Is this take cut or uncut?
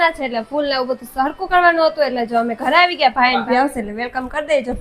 cut